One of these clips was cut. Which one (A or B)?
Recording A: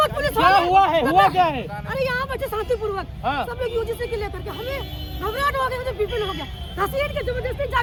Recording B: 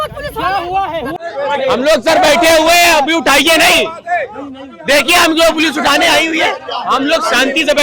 B